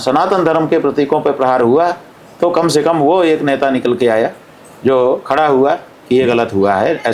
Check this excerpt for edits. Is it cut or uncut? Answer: uncut